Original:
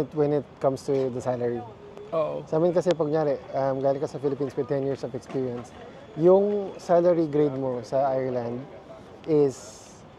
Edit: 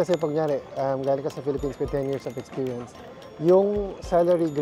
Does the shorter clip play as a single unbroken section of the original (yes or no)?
yes